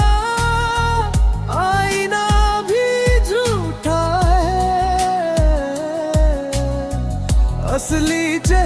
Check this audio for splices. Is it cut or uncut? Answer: uncut